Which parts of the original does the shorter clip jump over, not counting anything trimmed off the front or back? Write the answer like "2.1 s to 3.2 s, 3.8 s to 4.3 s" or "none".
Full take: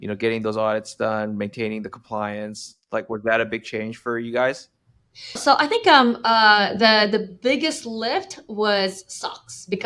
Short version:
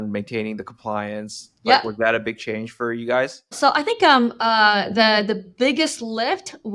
4.7 s to 5.3 s